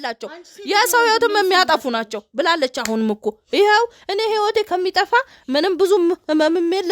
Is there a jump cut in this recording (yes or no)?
no